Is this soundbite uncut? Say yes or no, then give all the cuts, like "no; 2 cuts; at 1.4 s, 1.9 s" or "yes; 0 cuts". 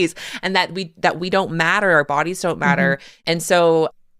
no; 1 cut; at 3.1 s